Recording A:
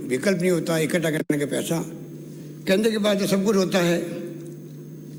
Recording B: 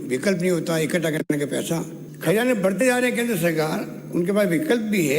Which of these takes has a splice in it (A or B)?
B